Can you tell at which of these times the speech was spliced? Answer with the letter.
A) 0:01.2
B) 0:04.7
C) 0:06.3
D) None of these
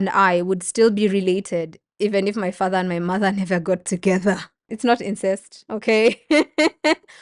B